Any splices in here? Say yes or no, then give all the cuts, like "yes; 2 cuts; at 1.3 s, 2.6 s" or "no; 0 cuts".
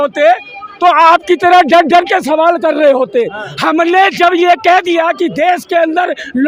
no; 0 cuts